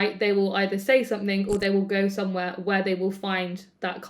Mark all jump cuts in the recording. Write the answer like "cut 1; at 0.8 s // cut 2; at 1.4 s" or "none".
none